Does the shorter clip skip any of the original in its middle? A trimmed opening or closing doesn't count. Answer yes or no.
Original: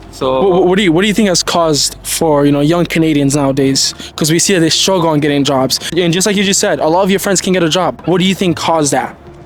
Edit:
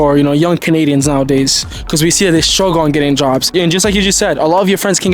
yes